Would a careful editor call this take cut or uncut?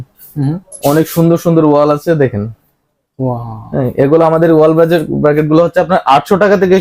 uncut